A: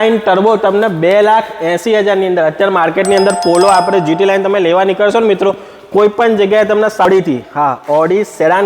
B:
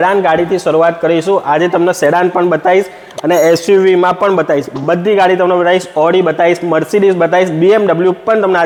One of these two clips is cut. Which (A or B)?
A